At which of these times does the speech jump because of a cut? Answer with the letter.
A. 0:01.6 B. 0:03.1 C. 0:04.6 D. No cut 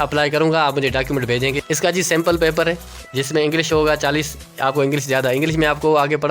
A